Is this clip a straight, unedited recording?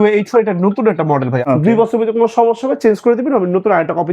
no; 1 cut; at 1.4 s

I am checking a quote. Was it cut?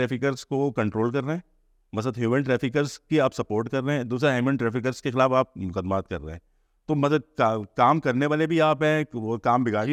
no; 0 cuts

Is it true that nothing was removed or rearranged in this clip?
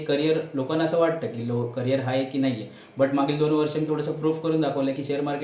yes; 0 cuts

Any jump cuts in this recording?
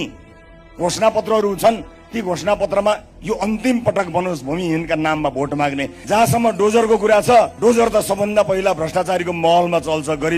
yes; 2 cuts; at 6.0 s, 7.5 s

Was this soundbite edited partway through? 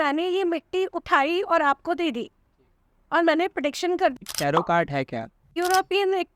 yes; 2 cuts; at 4.2 s, 5.6 s

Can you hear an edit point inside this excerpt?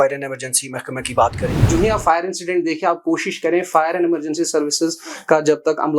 yes; 1 cut; at 1.6 s

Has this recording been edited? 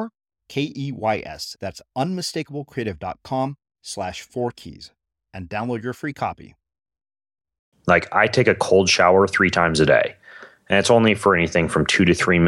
yes; 1 cut; at 7.7 s

